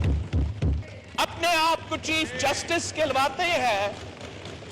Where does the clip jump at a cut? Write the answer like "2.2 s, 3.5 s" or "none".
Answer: 0.9 s

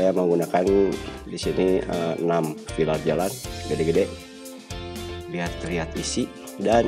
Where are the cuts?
none

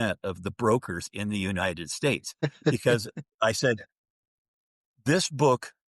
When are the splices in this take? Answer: 2.7 s

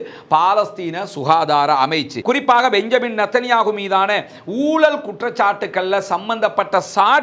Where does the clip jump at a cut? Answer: 2.1 s

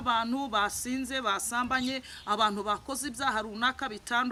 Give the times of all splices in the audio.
none

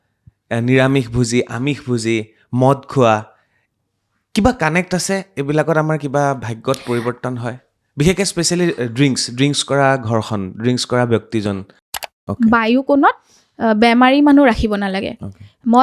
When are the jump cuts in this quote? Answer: 11.9 s

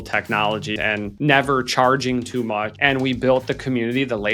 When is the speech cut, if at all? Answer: 2.7 s

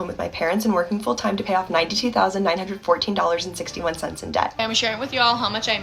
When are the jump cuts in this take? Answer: 4.5 s

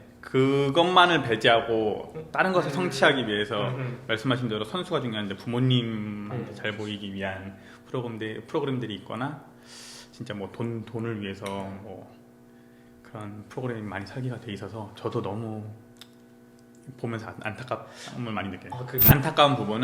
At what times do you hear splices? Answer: 18.9 s

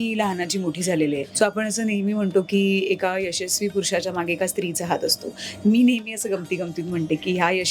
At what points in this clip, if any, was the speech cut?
1.3 s

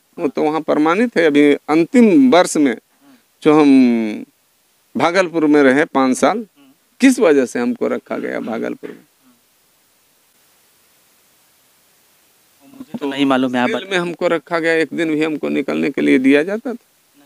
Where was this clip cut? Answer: none

